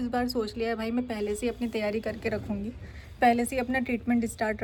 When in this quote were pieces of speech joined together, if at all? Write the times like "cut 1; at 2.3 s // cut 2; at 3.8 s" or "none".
none